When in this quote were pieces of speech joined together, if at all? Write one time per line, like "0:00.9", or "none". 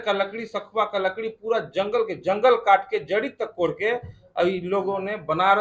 none